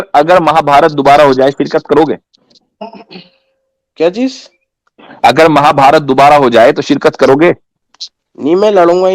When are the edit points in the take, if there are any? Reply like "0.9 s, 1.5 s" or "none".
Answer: 7.7 s